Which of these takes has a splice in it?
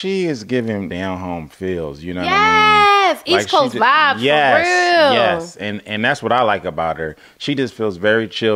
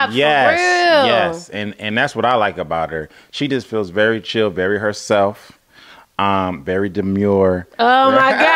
first; 1 cut; at 0.9 s

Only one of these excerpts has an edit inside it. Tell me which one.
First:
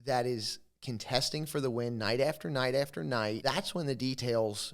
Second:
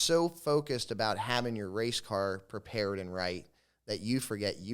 first; 1 cut; at 3.4 s

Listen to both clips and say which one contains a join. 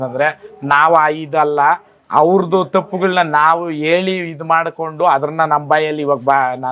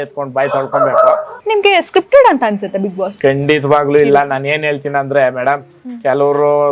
second; 2 cuts; at 1.3 s, 3.1 s

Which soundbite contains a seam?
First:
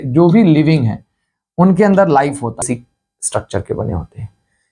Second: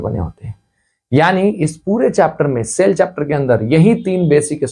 first; 1 cut; at 2.6 s

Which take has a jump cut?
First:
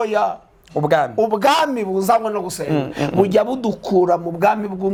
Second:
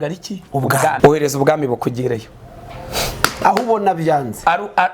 second; 1 cut; at 1.0 s

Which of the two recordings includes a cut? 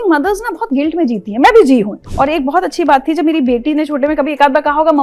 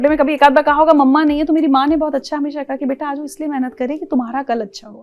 first; 1 cut; at 2.0 s

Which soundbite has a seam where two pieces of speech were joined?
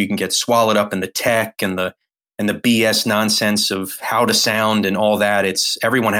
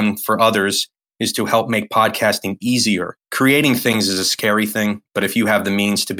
first; 1 cut; at 4.0 s

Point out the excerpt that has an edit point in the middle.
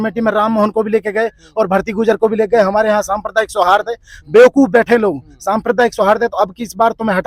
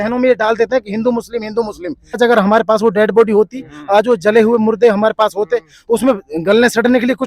second; 1 cut; at 2.2 s

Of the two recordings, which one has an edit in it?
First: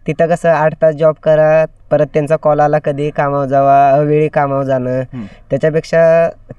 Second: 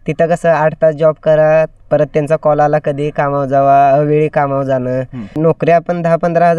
second; 1 cut; at 5.4 s

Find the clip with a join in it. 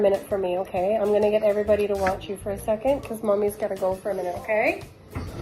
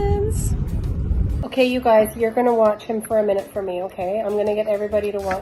second; 1 cut; at 1.4 s

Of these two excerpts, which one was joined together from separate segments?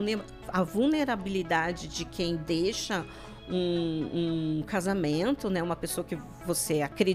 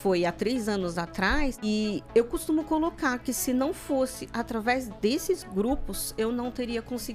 second; 1 cut; at 1.6 s

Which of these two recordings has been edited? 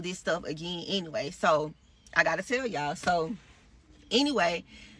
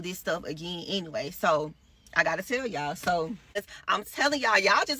second; 1 cut; at 3.7 s

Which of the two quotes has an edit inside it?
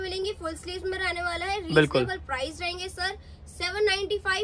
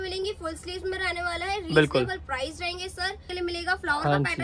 second; 1 cut; at 3.3 s

